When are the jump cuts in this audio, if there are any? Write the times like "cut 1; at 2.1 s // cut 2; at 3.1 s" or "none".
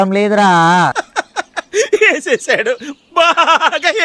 cut 1; at 0.9 s